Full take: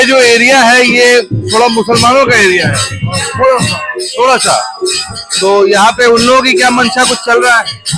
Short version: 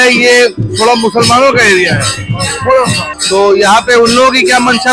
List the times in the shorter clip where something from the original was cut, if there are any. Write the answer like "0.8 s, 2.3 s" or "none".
3.1 s